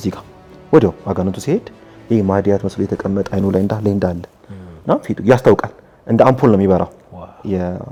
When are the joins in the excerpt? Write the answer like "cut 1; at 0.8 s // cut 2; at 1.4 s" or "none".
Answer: none